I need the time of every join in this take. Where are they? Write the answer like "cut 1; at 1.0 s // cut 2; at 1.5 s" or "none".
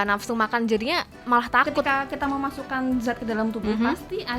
cut 1; at 1.8 s